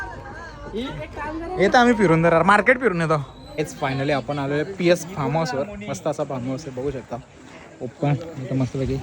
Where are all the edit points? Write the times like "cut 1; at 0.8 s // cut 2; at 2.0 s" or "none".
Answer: cut 1; at 3.7 s